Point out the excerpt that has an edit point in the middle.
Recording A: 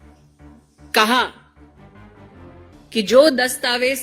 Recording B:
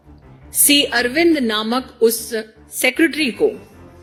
A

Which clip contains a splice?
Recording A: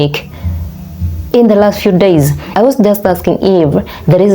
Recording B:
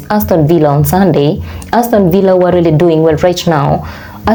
A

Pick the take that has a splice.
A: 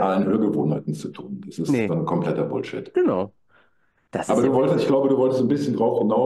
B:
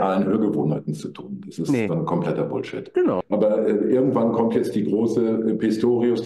B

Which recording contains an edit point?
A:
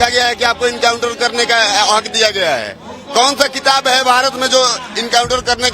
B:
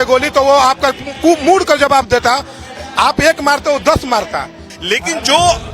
B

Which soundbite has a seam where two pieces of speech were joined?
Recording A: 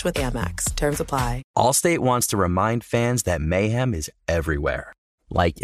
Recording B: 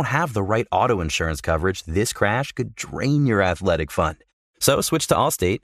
A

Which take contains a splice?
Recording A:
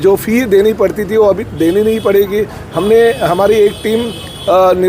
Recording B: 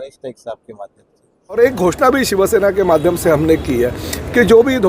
B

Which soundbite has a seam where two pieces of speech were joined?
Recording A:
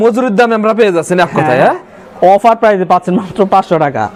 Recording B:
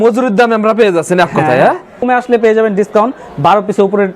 B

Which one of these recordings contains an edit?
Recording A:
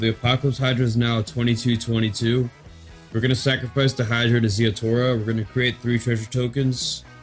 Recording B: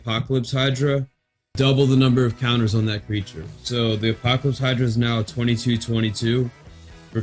B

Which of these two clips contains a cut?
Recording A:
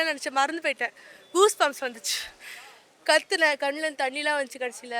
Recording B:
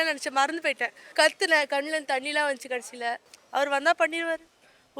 B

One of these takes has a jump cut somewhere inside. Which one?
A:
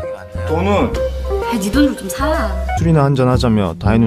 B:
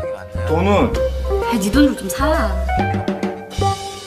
B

